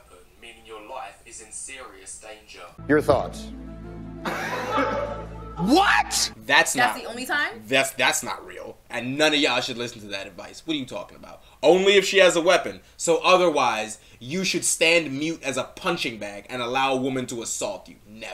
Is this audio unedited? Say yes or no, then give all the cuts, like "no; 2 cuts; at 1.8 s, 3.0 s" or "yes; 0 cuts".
yes; 0 cuts